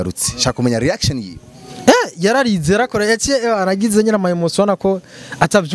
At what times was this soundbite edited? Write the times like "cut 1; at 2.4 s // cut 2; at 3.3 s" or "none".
none